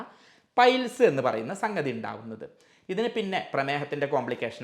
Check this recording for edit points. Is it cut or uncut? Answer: uncut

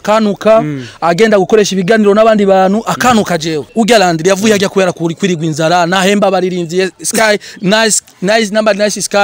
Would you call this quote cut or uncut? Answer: cut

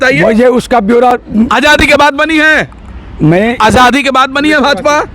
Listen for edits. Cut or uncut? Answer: uncut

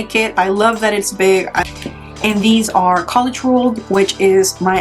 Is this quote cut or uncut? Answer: cut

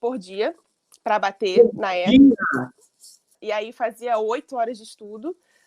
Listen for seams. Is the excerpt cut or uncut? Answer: cut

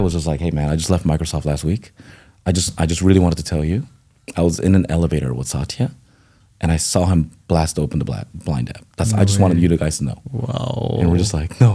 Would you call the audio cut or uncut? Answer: uncut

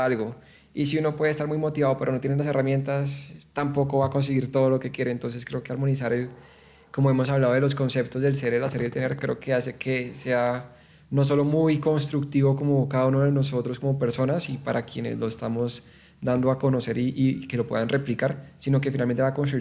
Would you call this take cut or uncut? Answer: uncut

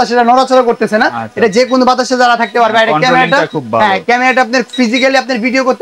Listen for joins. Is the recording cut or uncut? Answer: uncut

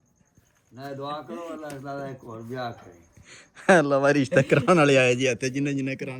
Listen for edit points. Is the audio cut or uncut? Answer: uncut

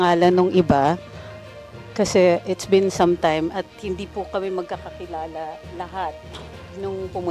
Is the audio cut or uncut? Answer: uncut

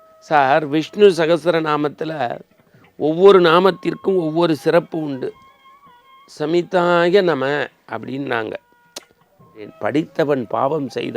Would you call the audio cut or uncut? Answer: cut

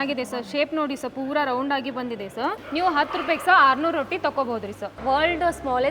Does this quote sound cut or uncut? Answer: cut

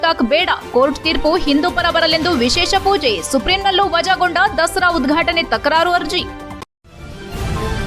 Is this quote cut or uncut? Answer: cut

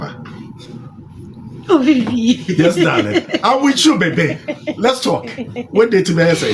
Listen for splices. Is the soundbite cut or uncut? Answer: uncut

